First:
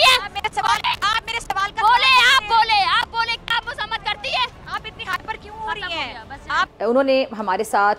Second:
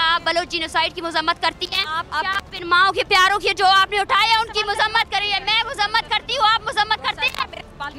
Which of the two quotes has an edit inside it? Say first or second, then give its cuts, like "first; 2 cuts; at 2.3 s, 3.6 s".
first; 1 cut; at 6.7 s